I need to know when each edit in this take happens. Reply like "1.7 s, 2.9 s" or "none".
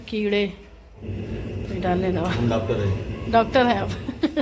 none